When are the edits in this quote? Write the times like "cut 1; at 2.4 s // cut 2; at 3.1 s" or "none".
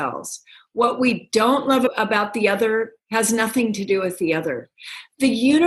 cut 1; at 1.9 s

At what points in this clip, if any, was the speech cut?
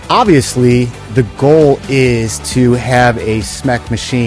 cut 1; at 1.0 s

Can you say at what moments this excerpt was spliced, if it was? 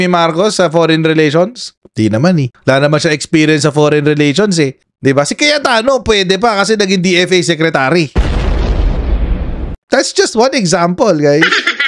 cut 1; at 9.7 s

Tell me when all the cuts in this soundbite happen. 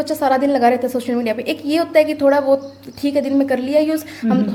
none

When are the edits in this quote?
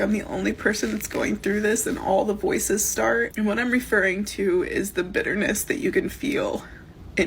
cut 1; at 3.3 s

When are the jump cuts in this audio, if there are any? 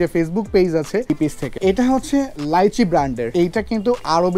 cut 1; at 1.2 s // cut 2; at 3.2 s

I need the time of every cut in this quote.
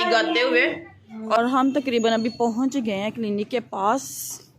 cut 1; at 1.4 s

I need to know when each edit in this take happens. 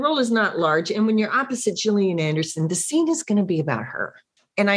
none

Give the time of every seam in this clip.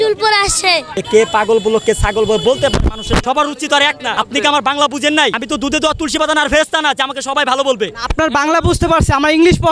cut 1; at 0.9 s // cut 2; at 3.2 s // cut 3; at 4.1 s // cut 4; at 5.4 s

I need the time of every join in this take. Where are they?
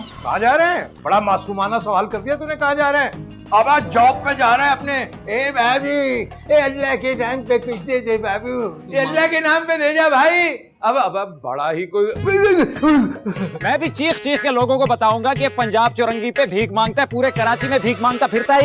cut 1; at 8.9 s // cut 2; at 13.5 s

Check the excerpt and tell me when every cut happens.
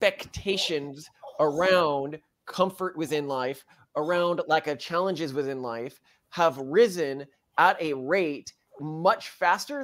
cut 1; at 8.8 s

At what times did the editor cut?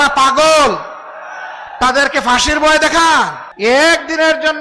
cut 1; at 3.4 s

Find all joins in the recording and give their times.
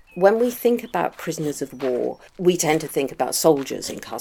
none

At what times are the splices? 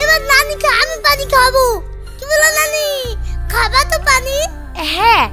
none

